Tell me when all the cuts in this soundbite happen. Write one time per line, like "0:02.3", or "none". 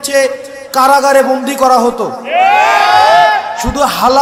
none